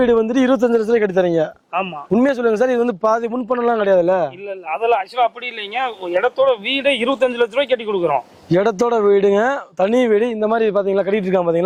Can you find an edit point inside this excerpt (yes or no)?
no